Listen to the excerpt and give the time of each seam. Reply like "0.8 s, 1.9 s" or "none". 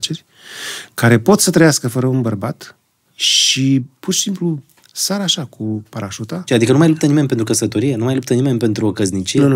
6.5 s